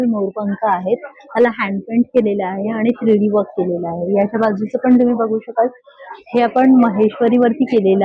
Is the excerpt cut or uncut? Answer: uncut